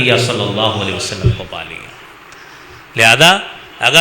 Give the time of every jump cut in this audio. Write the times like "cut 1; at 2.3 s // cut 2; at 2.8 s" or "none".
none